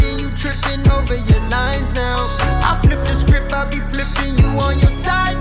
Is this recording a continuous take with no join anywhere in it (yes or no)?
yes